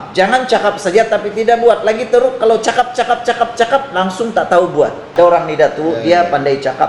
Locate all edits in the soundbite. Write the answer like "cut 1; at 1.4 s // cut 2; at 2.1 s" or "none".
cut 1; at 5.0 s